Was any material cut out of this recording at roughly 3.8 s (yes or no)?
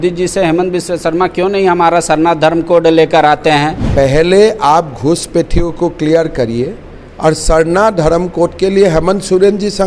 yes